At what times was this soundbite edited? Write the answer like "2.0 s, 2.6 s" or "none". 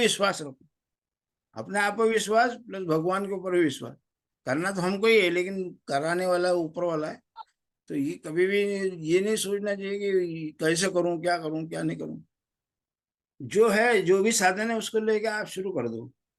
none